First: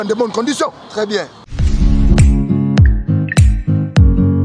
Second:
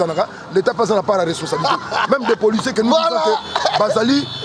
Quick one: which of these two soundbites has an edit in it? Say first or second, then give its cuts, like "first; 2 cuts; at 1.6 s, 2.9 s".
first; 1 cut; at 1.4 s